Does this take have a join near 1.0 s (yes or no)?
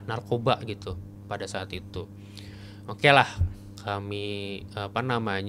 no